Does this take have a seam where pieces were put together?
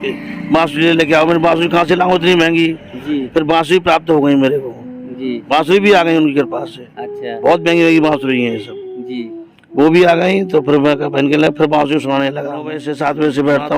yes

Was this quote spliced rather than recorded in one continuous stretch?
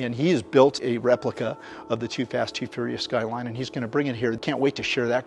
yes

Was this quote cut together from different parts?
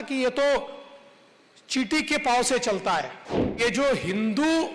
yes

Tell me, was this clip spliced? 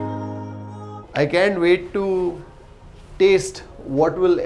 yes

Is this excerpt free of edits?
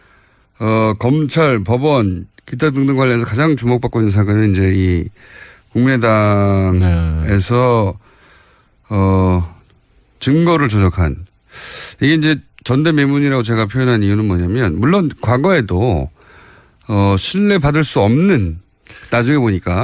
yes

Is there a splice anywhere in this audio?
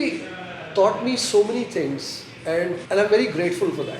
yes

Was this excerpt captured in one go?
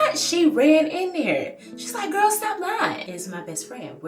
no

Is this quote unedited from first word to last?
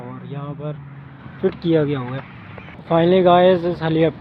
yes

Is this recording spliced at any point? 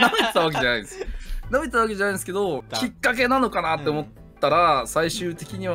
yes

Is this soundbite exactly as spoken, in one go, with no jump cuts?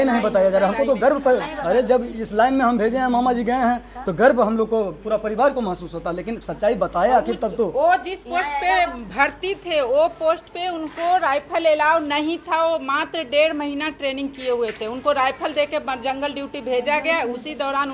yes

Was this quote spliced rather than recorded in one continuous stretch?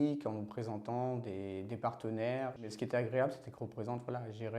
yes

